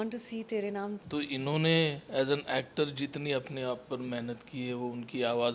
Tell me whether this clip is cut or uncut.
cut